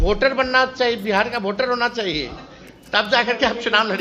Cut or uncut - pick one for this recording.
uncut